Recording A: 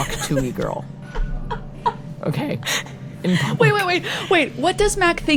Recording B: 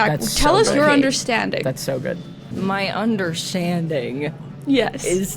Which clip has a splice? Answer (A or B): B